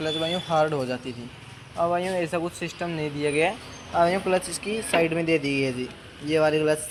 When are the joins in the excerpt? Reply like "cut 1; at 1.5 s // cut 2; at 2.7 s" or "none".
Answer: none